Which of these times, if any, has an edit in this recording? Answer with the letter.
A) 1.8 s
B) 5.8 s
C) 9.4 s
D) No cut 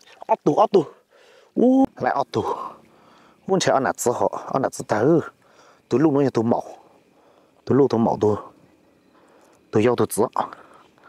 A